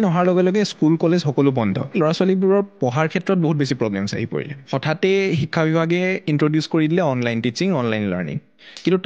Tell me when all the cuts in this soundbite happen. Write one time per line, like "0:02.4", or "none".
0:01.9
0:04.6